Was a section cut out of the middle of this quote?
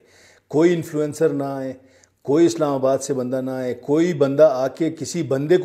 no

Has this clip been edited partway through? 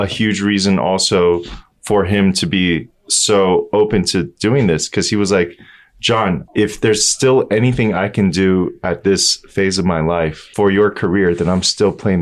yes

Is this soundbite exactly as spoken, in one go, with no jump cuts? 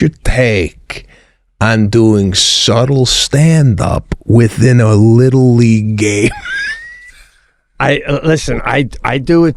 yes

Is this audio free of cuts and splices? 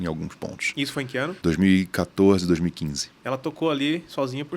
no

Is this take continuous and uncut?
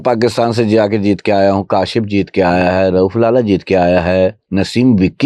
yes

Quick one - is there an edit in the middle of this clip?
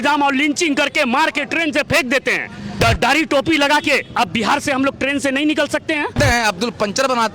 yes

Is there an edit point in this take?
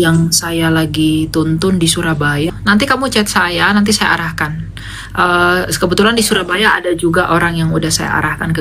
yes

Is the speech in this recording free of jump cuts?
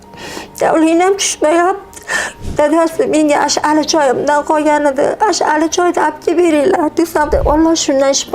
no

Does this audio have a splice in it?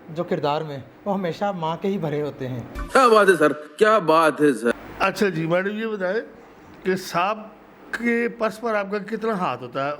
no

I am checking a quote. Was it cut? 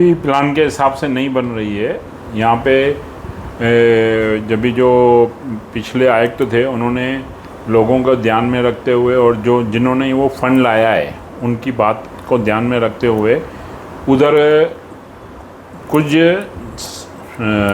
no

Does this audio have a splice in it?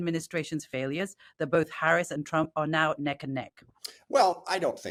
no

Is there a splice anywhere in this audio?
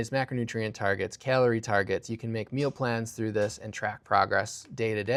no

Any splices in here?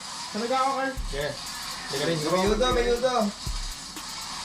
no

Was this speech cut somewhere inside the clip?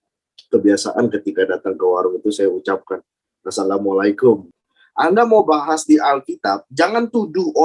yes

